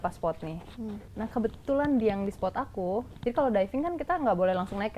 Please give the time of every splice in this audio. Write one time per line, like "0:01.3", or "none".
0:01.1
0:03.1